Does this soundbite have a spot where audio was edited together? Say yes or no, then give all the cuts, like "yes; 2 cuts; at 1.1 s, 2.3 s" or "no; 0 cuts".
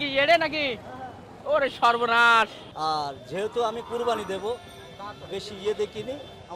yes; 1 cut; at 2.6 s